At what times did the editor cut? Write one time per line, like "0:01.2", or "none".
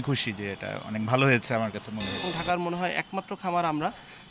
0:02.2

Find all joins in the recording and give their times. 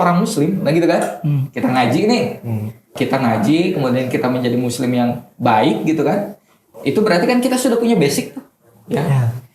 0:02.9
0:06.7

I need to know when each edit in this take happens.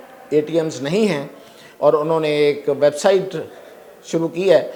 none

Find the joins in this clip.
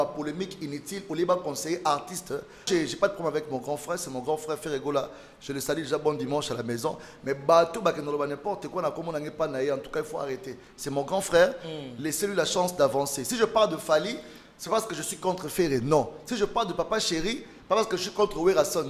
0:02.7

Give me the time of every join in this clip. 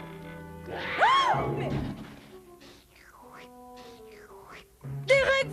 0:01.2

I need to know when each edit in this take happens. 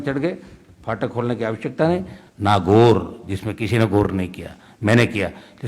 0:02.2

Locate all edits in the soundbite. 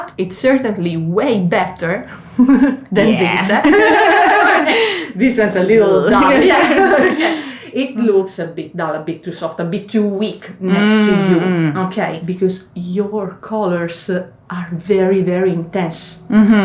none

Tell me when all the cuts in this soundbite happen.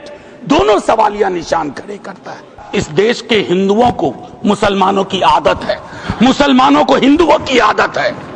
0:02.6

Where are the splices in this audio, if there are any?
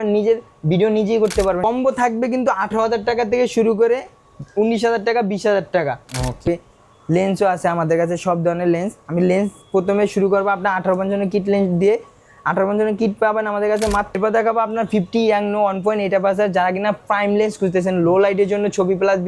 0:01.6
0:06.4
0:14.2

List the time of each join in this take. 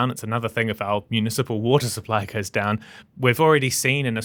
none

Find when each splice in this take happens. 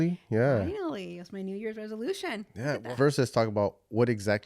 0:02.8

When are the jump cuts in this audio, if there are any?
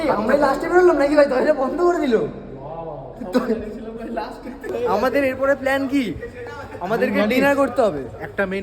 0:04.7

